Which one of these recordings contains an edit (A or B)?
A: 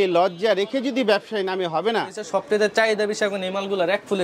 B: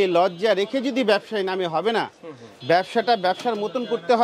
A